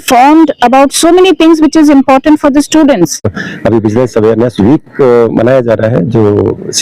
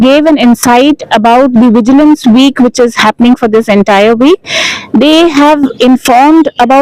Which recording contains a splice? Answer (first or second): first